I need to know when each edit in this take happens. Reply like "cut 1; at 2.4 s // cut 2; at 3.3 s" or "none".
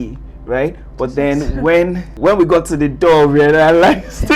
cut 1; at 2.1 s